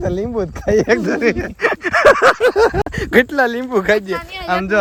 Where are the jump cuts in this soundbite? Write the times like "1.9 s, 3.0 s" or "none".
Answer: none

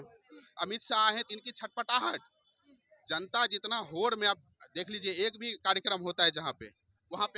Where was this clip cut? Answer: none

